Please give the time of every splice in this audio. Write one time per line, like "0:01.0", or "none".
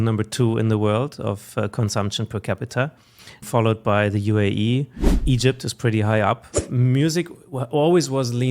0:03.5
0:05.2
0:06.6